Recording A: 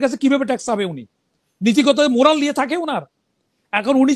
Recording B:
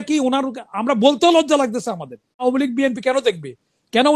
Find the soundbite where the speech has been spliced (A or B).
B